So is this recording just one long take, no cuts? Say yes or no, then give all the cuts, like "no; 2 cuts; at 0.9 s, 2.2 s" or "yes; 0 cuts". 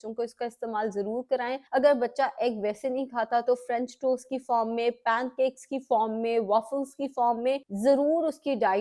no; 2 cuts; at 1.6 s, 7.7 s